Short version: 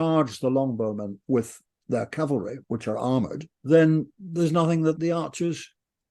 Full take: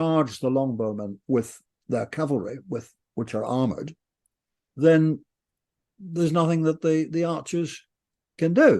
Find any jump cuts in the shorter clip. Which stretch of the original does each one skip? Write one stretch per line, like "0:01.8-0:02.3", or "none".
0:02.6-0:03.0
0:03.9-0:04.6
0:05.3-0:06.0
0:06.8-0:07.1